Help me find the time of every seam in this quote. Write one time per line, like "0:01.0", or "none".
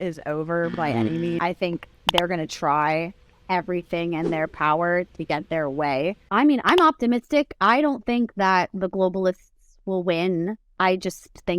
0:01.4
0:06.2

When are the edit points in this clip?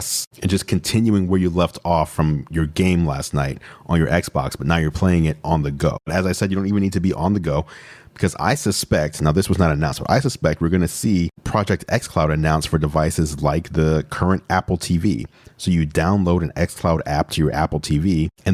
none

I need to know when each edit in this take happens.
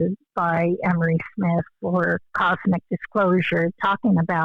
0:02.3

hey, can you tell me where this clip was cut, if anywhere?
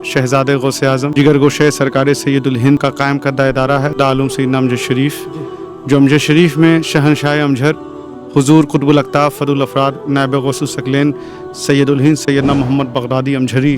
0:01.1
0:02.8

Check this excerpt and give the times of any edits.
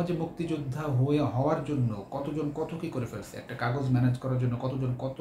none

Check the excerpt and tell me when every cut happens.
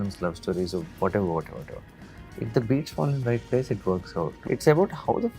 0:04.3

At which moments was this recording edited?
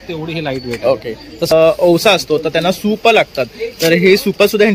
0:01.5

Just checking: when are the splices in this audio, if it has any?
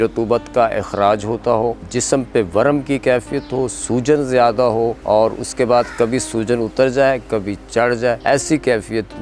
0:01.8
0:05.0
0:08.2

